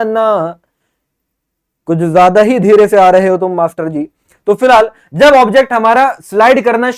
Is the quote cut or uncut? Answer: uncut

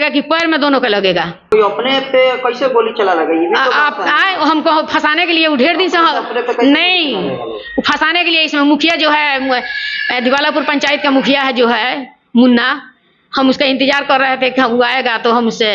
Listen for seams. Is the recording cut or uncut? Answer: cut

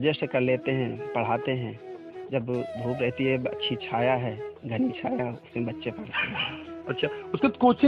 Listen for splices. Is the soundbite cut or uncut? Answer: uncut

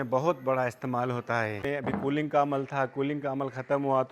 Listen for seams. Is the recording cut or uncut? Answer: cut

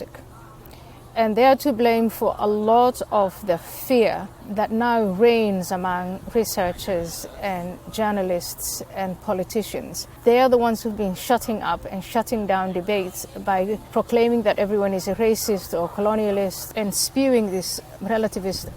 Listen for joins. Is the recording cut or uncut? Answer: cut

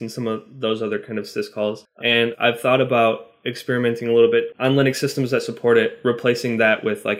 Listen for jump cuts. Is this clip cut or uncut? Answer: cut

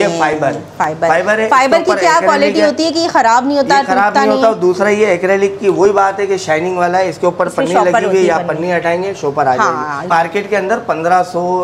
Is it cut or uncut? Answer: cut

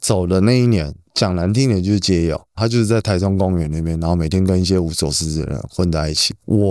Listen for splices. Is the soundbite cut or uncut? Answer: cut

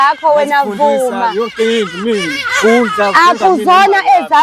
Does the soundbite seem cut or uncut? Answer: uncut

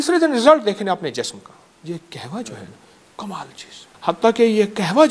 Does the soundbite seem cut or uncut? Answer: cut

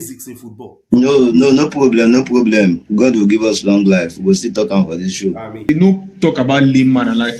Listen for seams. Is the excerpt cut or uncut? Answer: cut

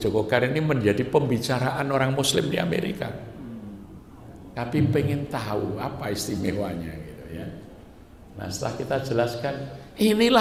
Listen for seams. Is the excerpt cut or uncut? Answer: uncut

